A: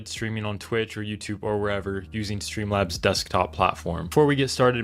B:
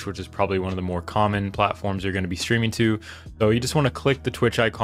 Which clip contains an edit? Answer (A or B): A